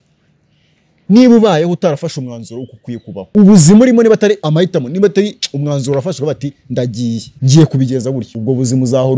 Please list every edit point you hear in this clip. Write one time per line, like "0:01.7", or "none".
0:03.2
0:04.4
0:07.3
0:08.3